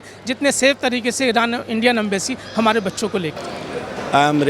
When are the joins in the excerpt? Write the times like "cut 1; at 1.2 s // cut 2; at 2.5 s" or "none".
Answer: cut 1; at 3.4 s